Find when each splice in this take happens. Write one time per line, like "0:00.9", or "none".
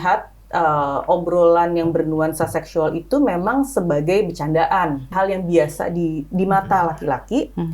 0:05.1